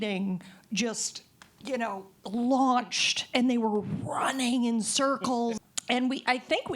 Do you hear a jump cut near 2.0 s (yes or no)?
no